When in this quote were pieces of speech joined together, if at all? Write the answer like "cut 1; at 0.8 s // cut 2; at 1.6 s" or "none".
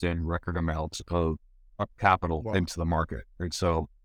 cut 1; at 1.9 s

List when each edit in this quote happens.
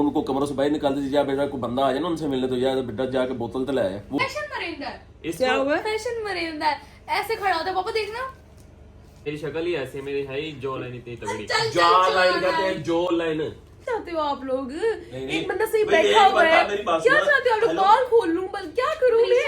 cut 1; at 4.2 s // cut 2; at 9.2 s // cut 3; at 13.8 s

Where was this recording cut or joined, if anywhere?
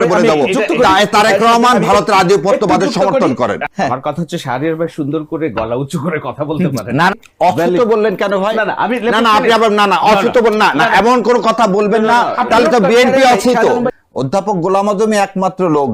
cut 1; at 3.6 s // cut 2; at 7.1 s // cut 3; at 13.9 s

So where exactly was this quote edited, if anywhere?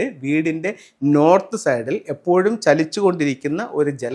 none

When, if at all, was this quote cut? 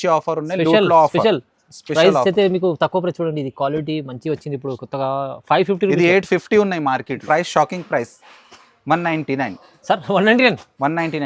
cut 1; at 7.2 s

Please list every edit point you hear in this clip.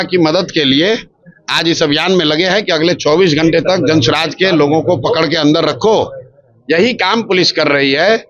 none

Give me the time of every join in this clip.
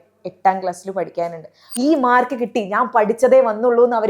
cut 1; at 1.6 s

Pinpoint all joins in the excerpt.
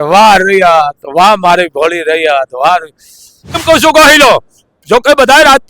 cut 1; at 3.6 s

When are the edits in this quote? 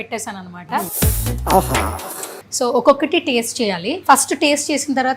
cut 1; at 0.9 s // cut 2; at 2.4 s // cut 3; at 3.9 s

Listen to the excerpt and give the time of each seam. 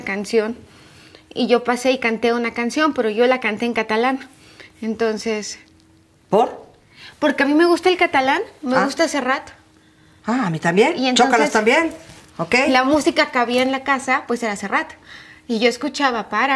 none

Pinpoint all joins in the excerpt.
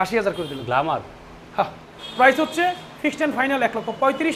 cut 1; at 1.9 s

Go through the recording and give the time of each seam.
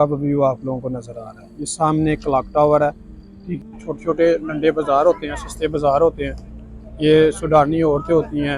cut 1; at 3.6 s

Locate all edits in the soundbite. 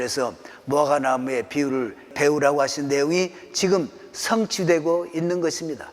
cut 1; at 2.1 s

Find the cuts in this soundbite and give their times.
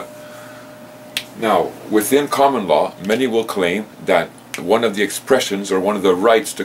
cut 1; at 4.3 s

